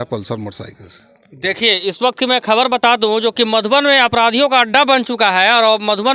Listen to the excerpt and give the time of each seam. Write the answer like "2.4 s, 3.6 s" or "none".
none